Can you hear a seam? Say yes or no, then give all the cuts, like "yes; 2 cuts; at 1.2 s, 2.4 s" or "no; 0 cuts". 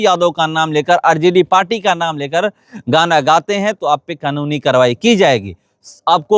no; 0 cuts